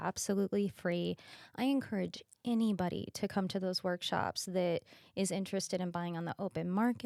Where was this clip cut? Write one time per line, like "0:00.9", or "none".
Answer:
none